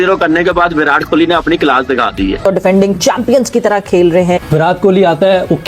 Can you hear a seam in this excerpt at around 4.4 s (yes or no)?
yes